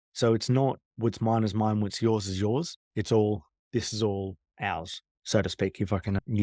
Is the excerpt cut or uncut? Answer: uncut